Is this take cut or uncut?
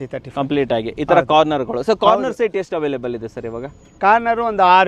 uncut